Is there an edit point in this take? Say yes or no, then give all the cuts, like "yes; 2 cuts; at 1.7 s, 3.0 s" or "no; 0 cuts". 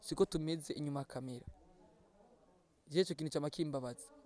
no; 0 cuts